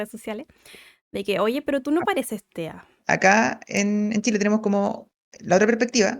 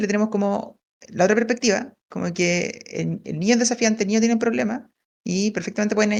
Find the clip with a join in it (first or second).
first